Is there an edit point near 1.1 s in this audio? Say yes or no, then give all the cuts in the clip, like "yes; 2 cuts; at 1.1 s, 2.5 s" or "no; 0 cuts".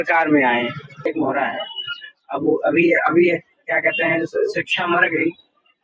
yes; 1 cut; at 1.1 s